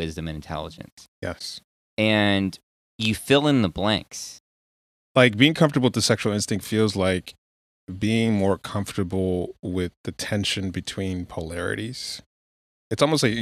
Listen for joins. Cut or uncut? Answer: cut